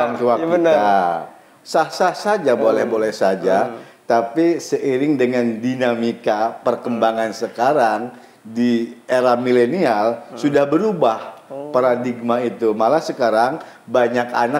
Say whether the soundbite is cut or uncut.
uncut